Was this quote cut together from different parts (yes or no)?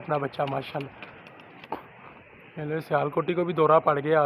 no